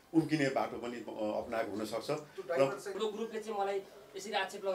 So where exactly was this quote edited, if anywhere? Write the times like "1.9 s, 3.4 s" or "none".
2.9 s